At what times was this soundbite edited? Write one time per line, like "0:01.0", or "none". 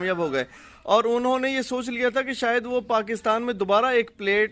none